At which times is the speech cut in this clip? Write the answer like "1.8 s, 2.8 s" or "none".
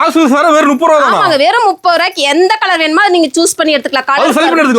none